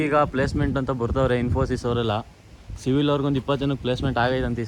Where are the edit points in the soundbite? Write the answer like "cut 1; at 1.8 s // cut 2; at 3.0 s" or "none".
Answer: none